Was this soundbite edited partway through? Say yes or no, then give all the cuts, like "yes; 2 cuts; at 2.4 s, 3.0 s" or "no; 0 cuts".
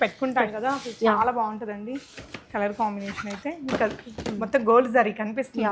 no; 0 cuts